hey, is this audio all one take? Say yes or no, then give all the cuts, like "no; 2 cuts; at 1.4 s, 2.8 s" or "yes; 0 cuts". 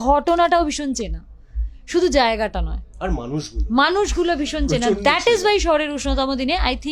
yes; 0 cuts